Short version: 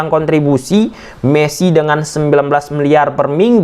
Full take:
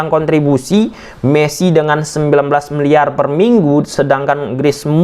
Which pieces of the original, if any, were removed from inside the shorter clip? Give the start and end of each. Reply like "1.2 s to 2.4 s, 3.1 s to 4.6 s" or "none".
none